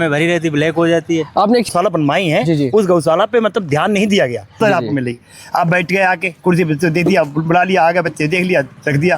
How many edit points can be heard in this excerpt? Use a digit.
2